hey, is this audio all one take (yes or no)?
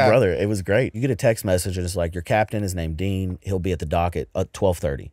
no